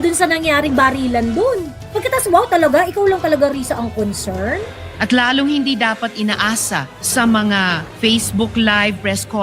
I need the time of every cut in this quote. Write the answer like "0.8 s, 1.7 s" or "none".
1.8 s, 4.9 s, 7.8 s